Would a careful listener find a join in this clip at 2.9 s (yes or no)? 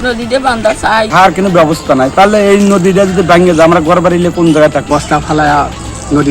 no